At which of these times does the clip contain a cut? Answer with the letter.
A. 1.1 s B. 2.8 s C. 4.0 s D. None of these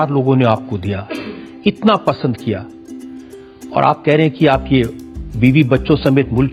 D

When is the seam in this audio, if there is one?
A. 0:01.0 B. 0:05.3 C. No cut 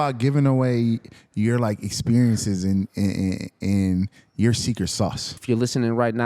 B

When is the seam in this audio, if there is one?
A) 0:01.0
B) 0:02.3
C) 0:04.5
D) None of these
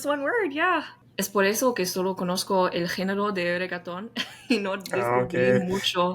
A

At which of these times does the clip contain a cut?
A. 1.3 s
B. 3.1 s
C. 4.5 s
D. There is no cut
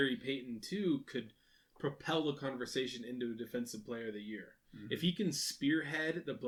D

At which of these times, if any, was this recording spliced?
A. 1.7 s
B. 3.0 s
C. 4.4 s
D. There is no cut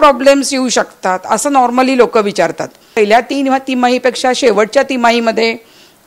B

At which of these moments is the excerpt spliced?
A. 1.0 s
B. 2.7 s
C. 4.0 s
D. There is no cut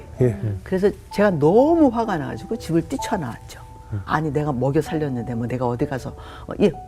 C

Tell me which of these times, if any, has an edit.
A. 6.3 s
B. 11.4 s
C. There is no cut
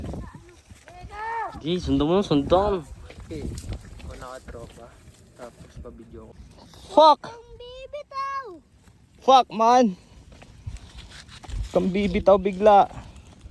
A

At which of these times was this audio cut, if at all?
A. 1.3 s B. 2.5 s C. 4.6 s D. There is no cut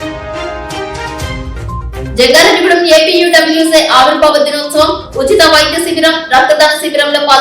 A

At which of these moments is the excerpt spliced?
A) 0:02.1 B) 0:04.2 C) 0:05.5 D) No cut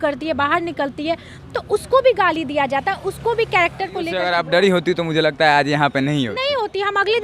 B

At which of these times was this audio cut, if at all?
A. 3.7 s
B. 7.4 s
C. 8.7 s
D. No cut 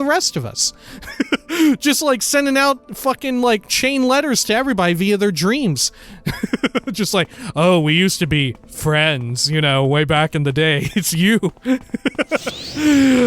B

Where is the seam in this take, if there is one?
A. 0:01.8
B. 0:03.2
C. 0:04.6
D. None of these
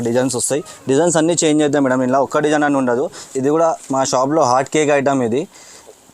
B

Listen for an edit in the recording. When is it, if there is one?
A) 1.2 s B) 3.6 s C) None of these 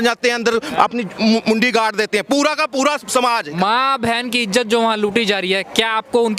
B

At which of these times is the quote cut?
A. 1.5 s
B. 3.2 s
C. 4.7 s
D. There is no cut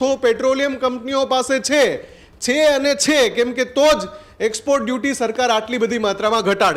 D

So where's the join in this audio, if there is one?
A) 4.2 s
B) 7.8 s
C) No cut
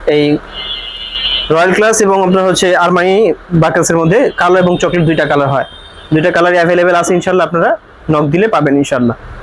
C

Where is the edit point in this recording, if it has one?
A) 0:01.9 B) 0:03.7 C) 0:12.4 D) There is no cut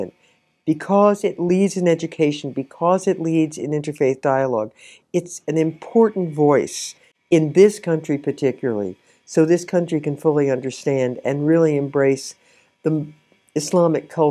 D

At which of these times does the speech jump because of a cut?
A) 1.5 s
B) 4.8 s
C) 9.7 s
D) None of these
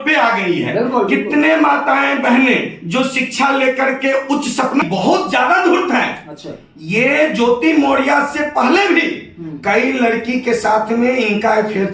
B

